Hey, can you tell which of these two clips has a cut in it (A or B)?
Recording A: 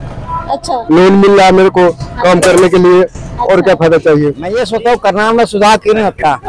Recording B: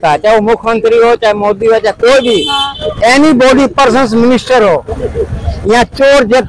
A